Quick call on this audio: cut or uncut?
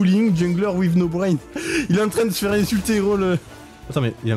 uncut